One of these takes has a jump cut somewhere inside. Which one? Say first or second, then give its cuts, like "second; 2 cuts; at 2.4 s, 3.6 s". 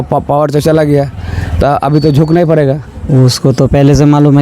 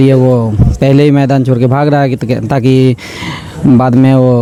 first; 1 cut; at 3.0 s